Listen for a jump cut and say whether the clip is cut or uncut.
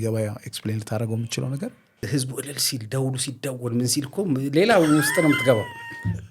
cut